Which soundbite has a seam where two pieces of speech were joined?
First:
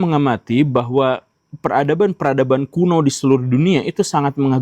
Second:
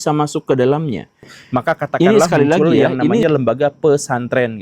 second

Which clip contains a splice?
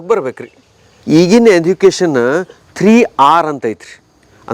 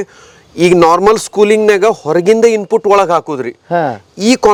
first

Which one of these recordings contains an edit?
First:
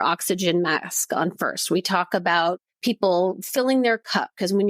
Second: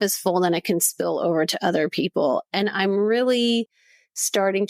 first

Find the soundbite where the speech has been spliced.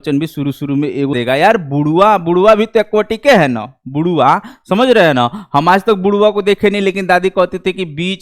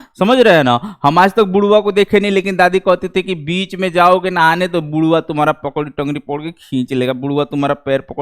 first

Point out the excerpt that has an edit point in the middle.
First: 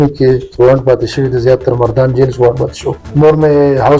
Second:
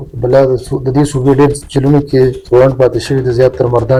first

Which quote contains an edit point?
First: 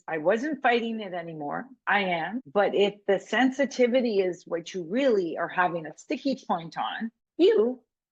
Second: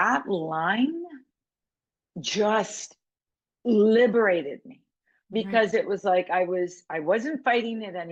first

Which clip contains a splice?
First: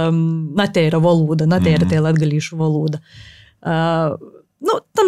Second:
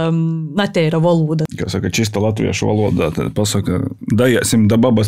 second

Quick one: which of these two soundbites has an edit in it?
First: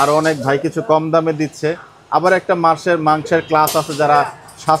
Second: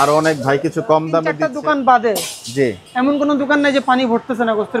second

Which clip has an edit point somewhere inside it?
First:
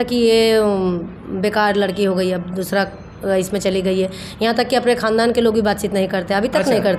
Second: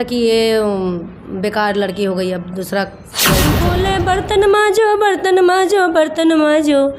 second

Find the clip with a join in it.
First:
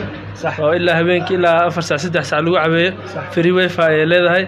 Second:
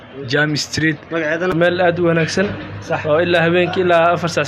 second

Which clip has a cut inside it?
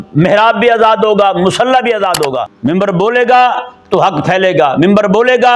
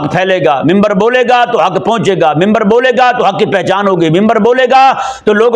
first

